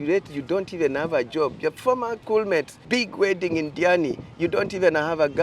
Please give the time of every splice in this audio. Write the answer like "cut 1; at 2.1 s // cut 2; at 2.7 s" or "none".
cut 1; at 2.2 s // cut 2; at 2.8 s